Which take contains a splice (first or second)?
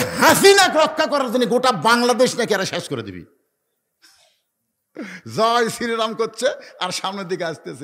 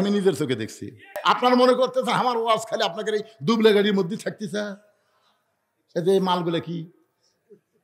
second